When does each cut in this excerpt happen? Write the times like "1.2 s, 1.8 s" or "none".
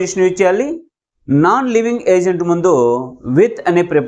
none